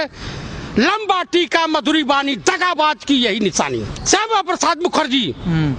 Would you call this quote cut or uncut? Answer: cut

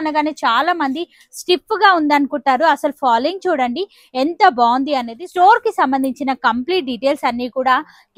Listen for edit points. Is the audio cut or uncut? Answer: cut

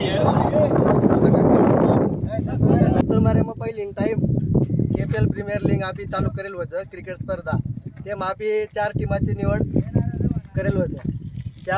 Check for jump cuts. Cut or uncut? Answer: cut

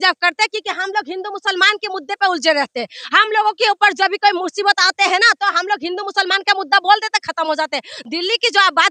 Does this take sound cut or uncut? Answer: uncut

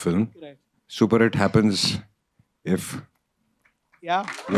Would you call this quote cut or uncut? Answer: uncut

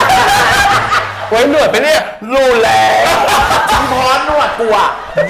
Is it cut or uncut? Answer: uncut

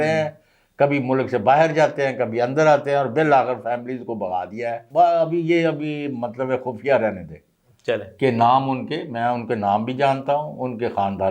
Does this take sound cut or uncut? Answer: cut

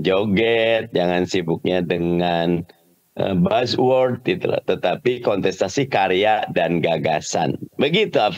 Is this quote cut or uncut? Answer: uncut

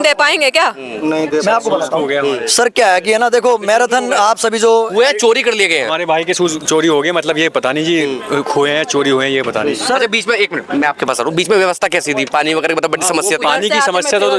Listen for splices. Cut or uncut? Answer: uncut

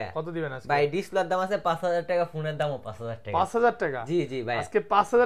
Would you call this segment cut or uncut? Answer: uncut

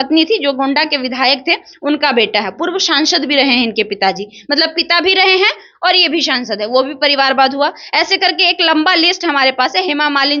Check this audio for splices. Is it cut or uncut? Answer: uncut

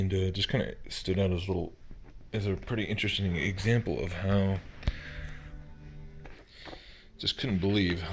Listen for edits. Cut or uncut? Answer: uncut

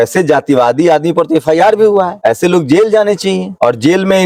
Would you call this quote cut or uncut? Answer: uncut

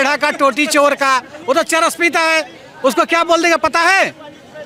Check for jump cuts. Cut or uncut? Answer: uncut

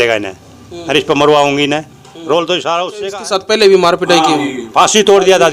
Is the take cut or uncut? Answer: cut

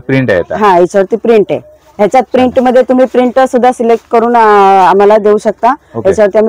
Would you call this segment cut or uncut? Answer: uncut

